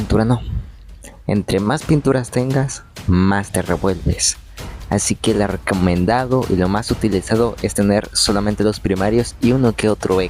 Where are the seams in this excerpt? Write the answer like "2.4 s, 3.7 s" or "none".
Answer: none